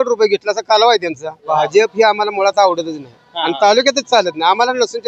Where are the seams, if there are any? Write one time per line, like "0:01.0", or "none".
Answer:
0:01.3